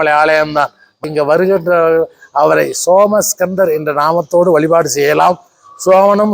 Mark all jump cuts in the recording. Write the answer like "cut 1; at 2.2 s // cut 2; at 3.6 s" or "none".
cut 1; at 1.0 s